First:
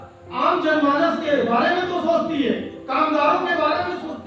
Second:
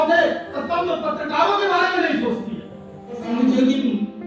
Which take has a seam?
second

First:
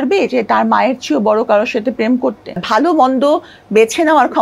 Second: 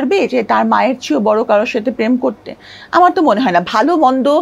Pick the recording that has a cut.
first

